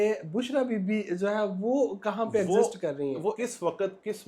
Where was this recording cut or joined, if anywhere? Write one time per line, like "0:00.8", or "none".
0:03.4